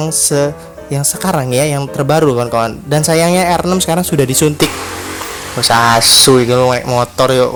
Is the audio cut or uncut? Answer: uncut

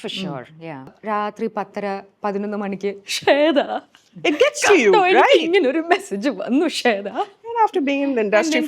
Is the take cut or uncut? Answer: cut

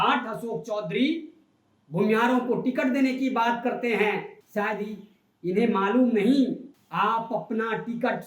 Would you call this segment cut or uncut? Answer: cut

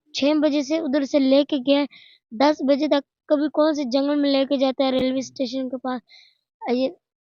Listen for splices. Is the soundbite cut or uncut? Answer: uncut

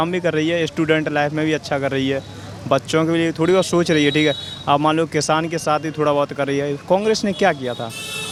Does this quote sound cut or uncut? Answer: uncut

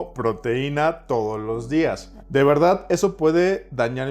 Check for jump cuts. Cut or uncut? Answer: cut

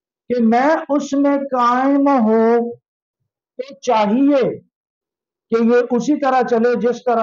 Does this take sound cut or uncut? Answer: uncut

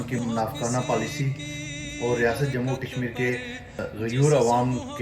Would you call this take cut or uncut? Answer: cut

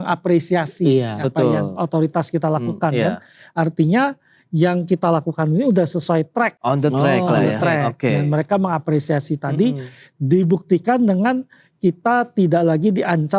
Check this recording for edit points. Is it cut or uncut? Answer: uncut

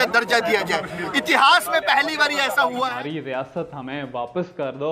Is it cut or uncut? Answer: cut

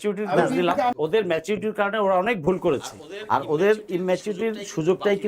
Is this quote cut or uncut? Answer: cut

